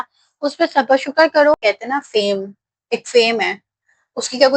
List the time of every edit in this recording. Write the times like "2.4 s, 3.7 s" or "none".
1.6 s